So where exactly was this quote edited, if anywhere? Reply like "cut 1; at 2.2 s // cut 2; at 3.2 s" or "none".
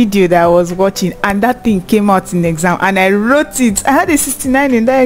cut 1; at 3.8 s

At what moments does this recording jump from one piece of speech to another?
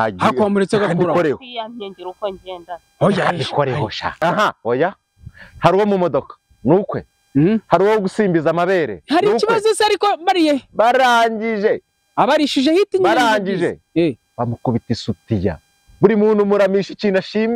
cut 1; at 4.2 s

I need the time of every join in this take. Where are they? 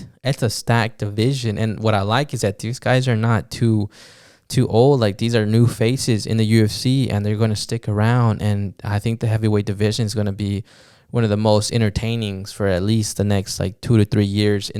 none

